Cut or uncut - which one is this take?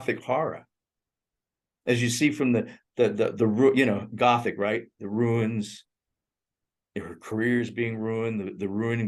uncut